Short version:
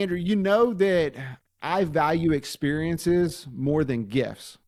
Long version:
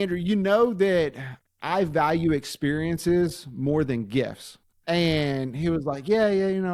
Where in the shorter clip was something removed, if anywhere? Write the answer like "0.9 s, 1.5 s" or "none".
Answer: none